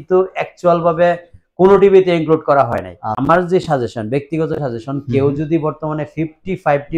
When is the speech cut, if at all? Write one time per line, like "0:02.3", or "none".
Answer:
0:03.1